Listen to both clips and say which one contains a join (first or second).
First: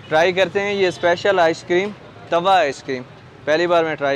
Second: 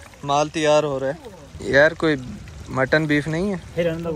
second